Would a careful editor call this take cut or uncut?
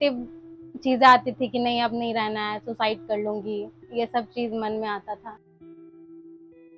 cut